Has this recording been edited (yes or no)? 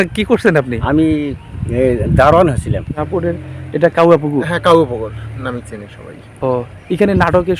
yes